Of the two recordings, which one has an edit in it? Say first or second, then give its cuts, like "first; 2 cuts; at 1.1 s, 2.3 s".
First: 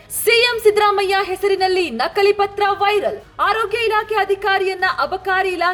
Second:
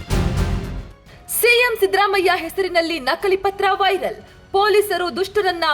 second; 1 cut; at 1.1 s